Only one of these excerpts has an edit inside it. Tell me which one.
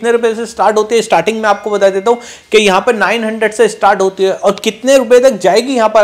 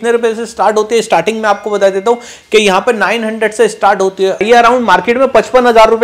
second; 1 cut; at 4.4 s

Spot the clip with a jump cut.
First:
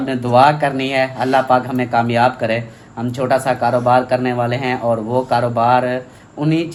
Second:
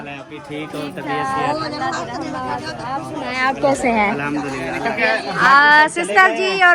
second; 1 cut; at 5.0 s

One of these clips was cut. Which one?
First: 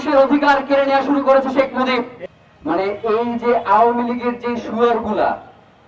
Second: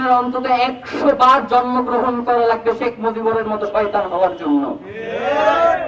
first; 1 cut; at 2.2 s

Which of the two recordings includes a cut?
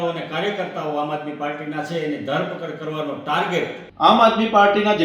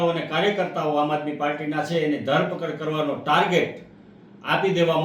first; 1 cut; at 3.8 s

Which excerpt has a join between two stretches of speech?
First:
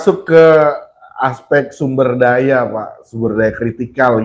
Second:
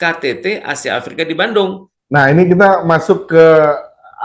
second; 1 cut; at 1.9 s

